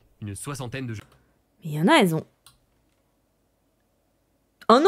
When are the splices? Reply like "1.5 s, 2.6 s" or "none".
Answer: 0.9 s